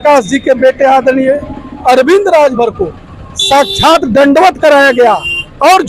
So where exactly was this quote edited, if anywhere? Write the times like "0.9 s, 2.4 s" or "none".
none